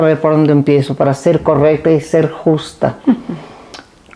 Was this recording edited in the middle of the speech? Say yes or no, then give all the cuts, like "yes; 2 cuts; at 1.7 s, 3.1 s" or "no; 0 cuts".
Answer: no; 0 cuts